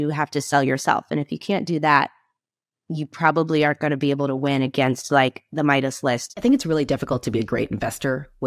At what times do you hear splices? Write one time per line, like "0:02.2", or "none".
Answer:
0:06.3